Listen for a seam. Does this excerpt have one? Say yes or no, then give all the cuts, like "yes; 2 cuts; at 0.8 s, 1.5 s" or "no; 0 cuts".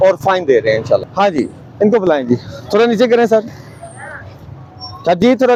no; 0 cuts